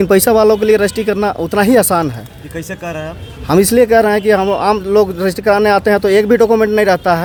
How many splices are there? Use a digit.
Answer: 0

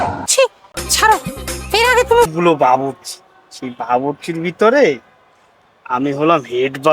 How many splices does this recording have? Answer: 1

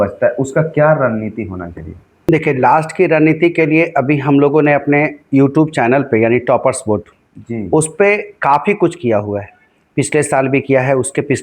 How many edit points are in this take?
1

